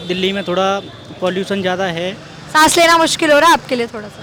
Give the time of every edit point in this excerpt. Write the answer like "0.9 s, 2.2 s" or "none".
none